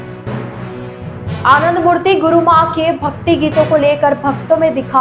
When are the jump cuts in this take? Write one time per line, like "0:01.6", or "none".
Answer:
0:01.4